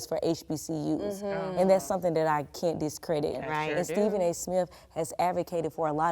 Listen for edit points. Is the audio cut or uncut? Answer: cut